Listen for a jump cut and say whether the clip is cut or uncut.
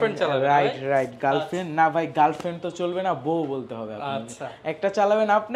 uncut